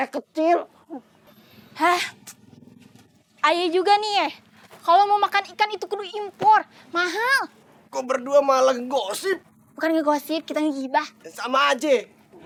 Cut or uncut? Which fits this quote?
uncut